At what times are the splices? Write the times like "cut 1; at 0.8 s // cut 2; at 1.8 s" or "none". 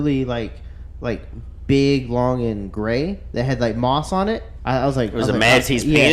cut 1; at 4.5 s